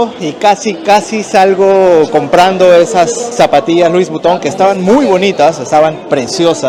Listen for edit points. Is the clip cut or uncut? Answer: uncut